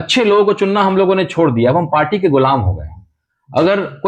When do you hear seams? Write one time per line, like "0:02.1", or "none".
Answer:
none